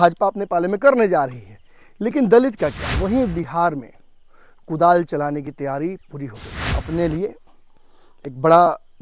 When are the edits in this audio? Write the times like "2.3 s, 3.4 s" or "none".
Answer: 2.9 s, 6.7 s